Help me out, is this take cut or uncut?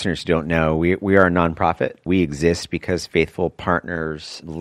cut